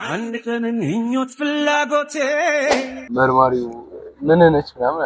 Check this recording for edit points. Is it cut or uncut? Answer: cut